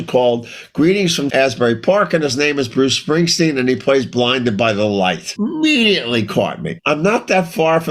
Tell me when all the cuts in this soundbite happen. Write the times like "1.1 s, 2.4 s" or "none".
5.3 s, 6.7 s